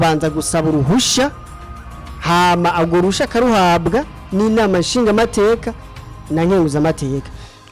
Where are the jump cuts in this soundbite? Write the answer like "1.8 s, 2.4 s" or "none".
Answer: none